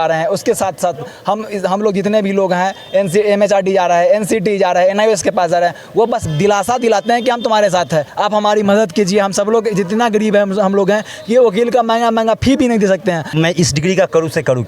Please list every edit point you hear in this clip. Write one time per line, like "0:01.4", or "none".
0:08.1
0:13.3